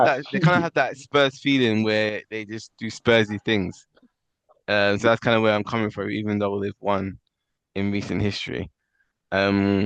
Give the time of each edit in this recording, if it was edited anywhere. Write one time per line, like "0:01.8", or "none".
none